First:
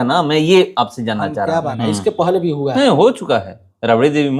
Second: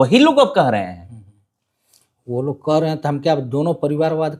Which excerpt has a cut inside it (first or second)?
first